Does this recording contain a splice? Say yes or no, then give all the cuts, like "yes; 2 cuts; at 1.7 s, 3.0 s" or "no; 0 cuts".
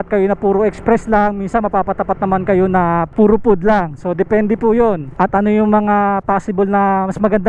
yes; 2 cuts; at 3.1 s, 5.1 s